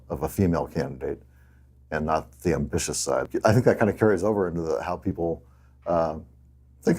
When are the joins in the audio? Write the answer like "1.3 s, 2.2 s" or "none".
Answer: 3.3 s